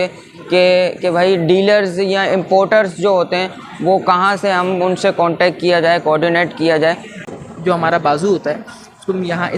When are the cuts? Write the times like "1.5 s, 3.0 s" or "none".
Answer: 7.3 s